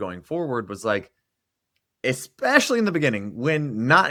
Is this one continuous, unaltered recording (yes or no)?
yes